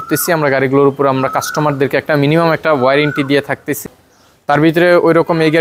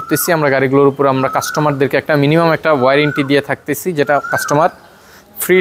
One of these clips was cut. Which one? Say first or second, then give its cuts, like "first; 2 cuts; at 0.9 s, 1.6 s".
first; 1 cut; at 3.8 s